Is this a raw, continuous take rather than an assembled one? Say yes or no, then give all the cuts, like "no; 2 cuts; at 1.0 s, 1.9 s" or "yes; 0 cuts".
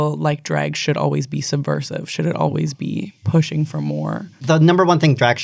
yes; 0 cuts